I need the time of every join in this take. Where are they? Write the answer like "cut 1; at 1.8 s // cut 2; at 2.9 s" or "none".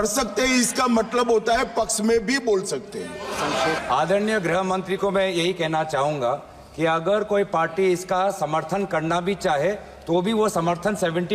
cut 1; at 3.8 s